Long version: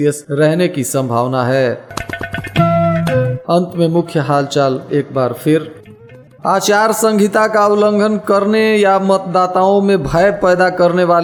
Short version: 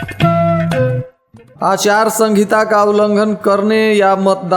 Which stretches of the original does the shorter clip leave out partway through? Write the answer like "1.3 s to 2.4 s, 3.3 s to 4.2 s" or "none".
3.4 s to 5.8 s